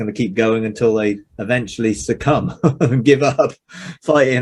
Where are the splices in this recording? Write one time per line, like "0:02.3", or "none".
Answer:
0:01.3